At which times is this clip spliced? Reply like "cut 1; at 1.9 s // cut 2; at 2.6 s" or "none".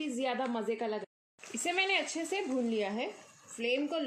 cut 1; at 1.0 s